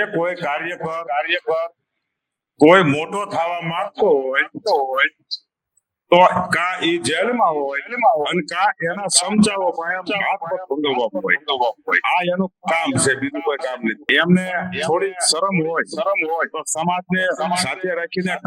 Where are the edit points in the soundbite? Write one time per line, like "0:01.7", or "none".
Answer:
0:14.0